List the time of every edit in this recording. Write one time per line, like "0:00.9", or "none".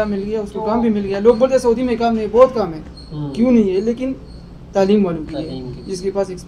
none

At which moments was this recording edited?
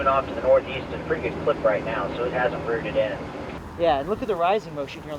0:03.5

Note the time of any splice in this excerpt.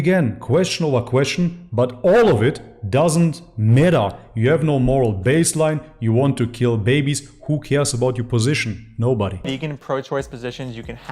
0:09.4

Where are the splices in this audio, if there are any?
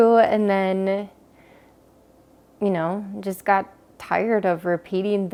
none

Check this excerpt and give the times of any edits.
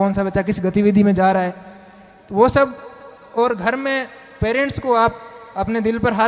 none

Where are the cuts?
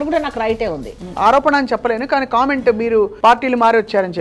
0:01.0
0:03.1

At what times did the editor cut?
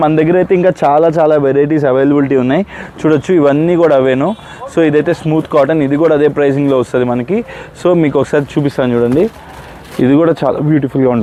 none

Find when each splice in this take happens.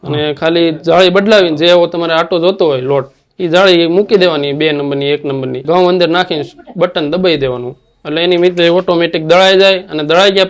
0:05.6

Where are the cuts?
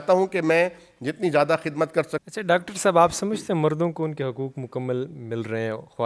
0:02.2

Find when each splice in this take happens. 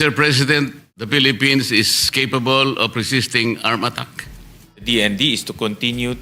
0:00.9
0:04.8

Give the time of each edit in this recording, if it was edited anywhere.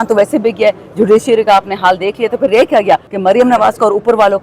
0:03.1

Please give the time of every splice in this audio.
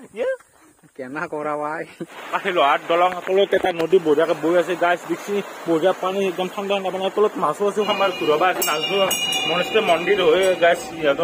0:02.1
0:07.9

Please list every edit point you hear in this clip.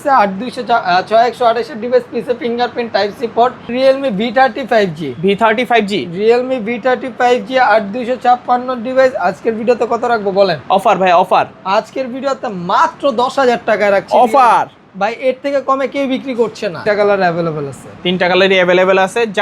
0:03.7
0:16.8

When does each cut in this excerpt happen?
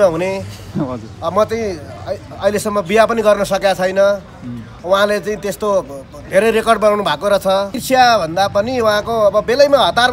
0:07.8

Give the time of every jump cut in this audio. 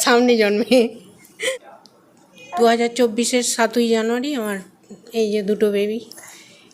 0:01.5

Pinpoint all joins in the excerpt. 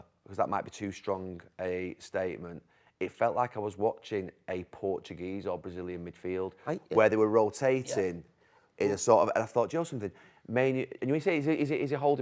none

